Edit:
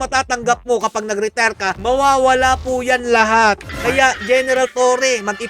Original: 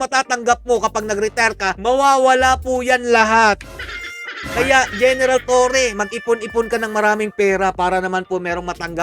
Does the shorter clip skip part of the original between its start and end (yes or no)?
yes